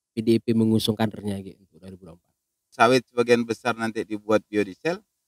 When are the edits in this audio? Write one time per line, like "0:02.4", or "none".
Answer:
0:02.7